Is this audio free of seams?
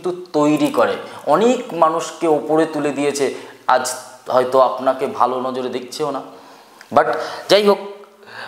yes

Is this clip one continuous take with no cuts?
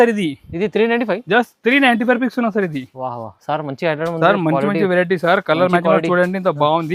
yes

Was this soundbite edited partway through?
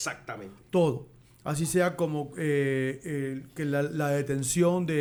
no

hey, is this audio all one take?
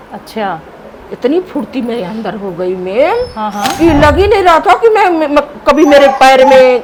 yes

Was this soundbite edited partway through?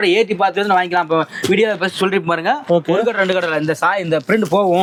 no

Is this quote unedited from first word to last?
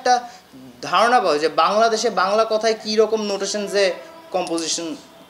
yes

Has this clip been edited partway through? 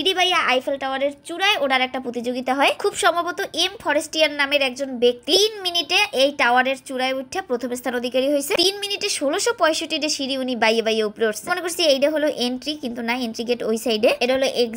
no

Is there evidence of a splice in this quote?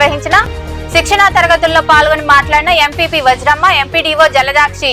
no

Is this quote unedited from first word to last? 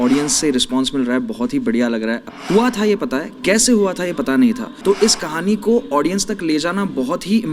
no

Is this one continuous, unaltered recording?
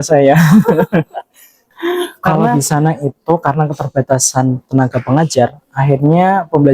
no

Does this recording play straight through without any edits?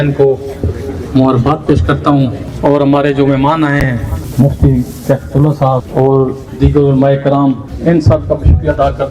no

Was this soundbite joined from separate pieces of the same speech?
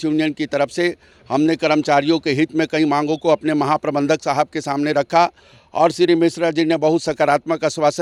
no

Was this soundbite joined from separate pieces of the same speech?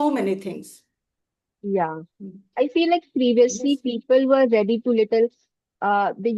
no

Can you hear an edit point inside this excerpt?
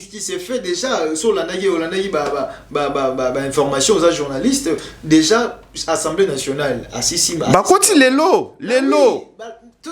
no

